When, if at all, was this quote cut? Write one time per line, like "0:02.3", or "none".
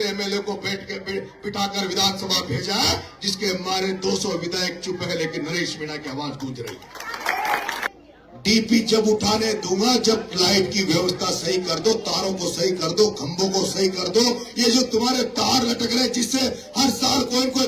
0:07.8